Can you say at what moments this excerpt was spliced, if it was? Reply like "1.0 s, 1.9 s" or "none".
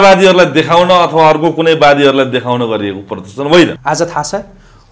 3.8 s

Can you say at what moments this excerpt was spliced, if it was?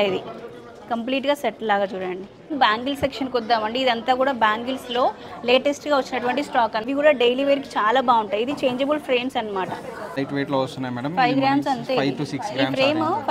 2.5 s, 6.8 s, 10.2 s

